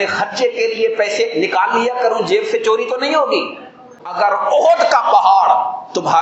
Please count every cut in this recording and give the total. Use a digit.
1